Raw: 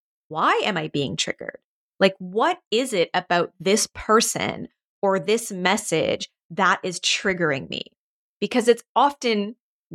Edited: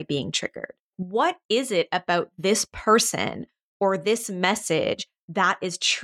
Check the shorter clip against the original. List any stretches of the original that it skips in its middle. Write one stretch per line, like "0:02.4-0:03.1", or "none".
0:01.9-0:02.2